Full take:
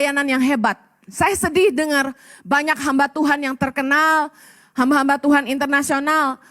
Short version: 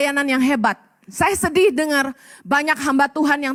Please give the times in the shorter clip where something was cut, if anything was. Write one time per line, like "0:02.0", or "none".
none